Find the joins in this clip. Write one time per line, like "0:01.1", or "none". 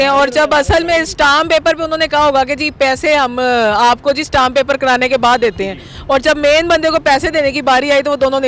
none